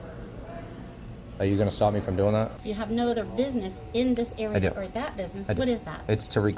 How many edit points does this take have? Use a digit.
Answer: 1